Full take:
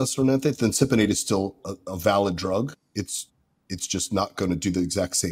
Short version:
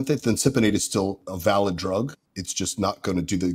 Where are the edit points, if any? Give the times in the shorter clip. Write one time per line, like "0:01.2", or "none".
0:01.3
0:02.2